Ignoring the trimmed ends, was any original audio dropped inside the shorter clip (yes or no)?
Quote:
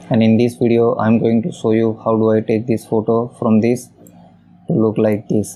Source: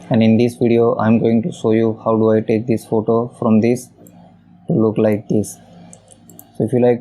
no